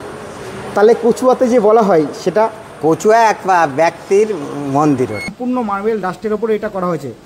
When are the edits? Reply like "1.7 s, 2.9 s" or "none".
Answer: 5.3 s

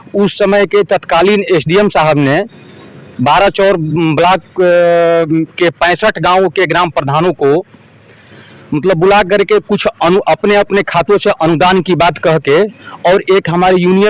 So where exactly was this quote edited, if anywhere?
none

